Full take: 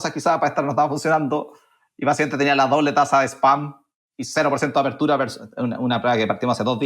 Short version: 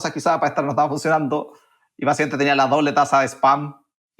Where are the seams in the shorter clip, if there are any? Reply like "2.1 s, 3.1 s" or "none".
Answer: none

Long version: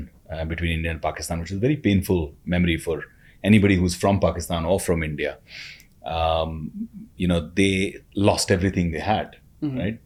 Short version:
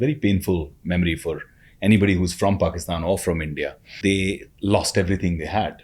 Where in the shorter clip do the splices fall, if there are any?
3.9 s

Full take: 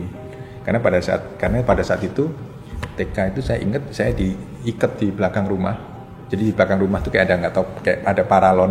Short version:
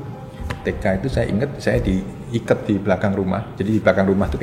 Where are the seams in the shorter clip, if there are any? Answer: 3.5 s

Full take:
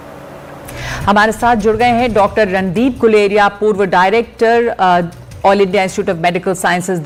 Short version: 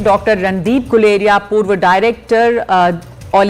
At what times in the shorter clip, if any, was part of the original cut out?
none

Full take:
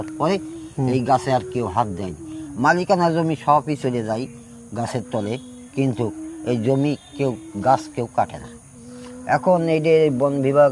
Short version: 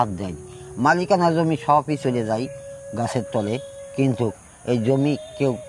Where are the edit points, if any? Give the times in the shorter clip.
none

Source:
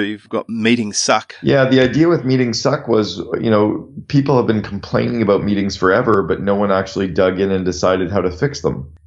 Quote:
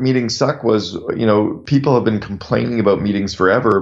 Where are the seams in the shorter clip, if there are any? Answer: 1.6 s

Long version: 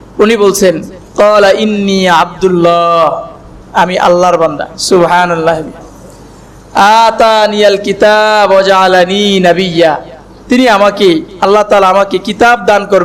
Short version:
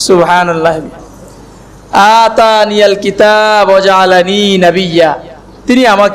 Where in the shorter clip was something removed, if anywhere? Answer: none

